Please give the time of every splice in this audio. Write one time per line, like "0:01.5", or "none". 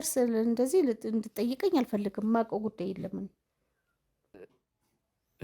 0:04.3